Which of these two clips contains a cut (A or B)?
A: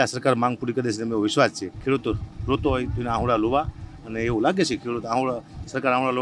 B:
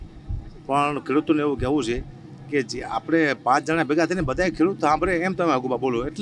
A